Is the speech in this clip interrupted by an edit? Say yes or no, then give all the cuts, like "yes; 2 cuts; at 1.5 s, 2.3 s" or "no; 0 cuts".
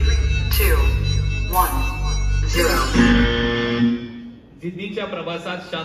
no; 0 cuts